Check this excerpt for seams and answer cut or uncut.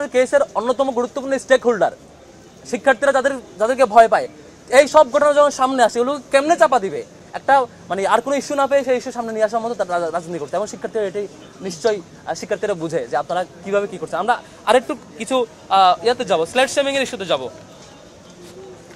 uncut